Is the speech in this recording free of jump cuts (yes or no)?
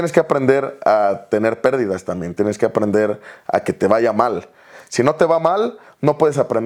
yes